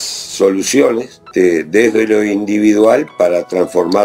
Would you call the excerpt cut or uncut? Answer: cut